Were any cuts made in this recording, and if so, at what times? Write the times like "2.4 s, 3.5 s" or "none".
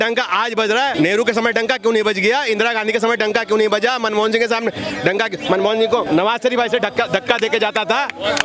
0.9 s, 6.1 s